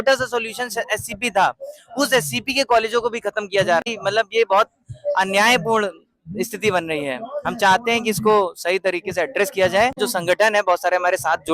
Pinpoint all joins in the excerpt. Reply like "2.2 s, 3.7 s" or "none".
3.9 s, 10.0 s

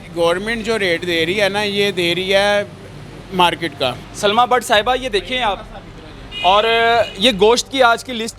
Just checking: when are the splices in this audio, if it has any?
4.1 s

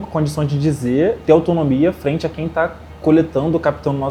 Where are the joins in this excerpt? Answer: 1.2 s

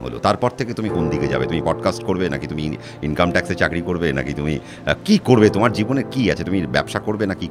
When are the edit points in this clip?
none

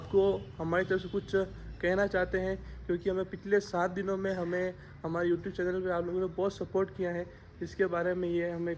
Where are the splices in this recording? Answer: none

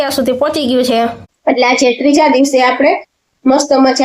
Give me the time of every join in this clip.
1.3 s

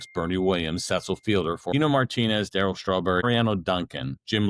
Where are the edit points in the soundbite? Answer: 1.7 s, 3.2 s

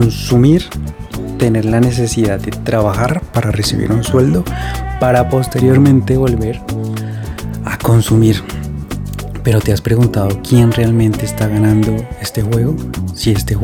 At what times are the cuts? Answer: none

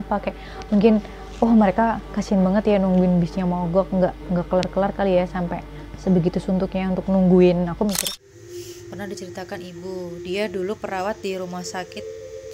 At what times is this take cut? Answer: 8.0 s

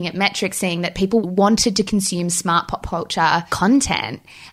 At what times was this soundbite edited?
1.2 s

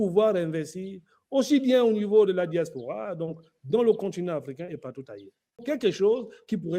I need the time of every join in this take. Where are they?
5.6 s

